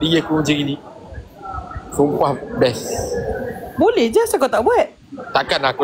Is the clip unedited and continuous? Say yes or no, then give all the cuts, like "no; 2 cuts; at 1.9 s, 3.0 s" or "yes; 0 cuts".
yes; 0 cuts